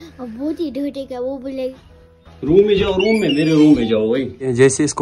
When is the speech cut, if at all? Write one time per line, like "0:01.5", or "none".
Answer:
0:01.7